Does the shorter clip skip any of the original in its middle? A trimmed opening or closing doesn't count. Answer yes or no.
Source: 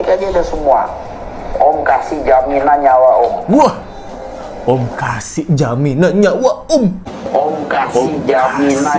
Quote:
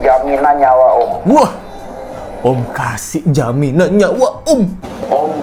no